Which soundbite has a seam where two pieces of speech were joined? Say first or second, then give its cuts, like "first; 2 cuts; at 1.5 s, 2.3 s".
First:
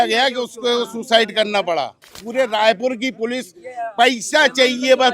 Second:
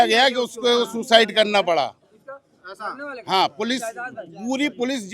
first; 1 cut; at 2.2 s